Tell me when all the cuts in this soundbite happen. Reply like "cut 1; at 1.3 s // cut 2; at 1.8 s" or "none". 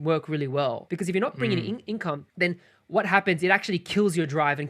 cut 1; at 0.8 s // cut 2; at 2.3 s